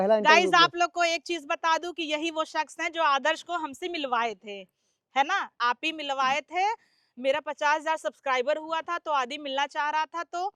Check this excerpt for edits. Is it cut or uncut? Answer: uncut